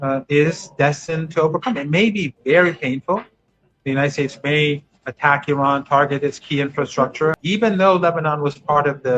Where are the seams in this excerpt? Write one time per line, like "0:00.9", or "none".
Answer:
0:07.4